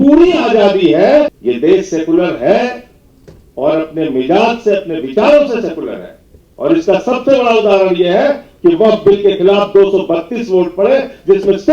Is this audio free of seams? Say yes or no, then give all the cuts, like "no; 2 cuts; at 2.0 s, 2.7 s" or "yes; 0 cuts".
no; 1 cut; at 1.3 s